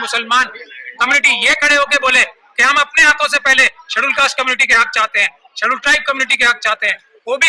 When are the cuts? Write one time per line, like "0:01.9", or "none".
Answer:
none